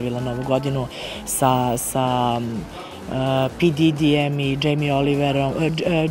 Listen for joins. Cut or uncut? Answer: uncut